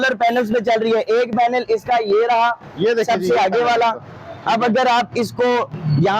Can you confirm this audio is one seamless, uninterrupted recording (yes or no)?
yes